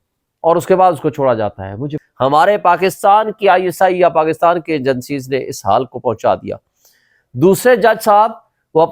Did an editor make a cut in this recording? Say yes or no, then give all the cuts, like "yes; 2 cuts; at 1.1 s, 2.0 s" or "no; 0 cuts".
yes; 1 cut; at 2.0 s